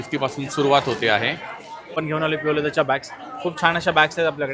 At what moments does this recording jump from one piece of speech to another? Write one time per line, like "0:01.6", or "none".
0:01.9